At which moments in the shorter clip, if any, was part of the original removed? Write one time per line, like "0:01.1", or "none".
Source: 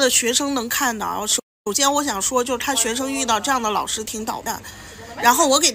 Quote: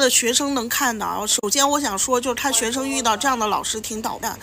0:01.3